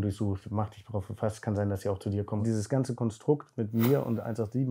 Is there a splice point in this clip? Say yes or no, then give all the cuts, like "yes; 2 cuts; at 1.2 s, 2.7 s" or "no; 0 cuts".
yes; 1 cut; at 2.4 s